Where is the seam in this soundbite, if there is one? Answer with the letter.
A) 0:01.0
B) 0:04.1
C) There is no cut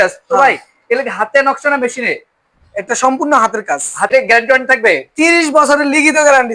B